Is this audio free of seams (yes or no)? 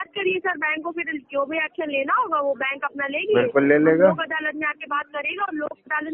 yes